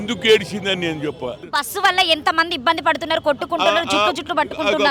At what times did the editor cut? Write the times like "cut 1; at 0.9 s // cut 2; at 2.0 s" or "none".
cut 1; at 1.5 s

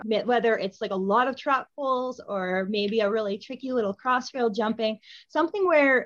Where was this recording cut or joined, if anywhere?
none

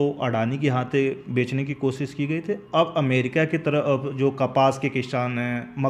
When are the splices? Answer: none

